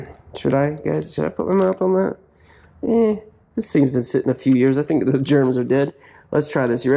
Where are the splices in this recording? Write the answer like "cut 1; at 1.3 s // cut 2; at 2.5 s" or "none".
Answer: none